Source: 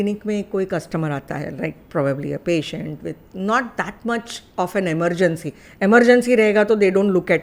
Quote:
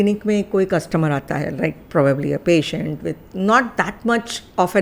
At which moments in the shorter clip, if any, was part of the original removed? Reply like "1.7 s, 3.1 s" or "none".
none